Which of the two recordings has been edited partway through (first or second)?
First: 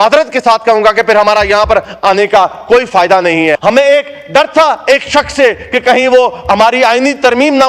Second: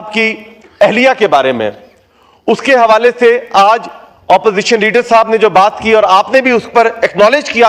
first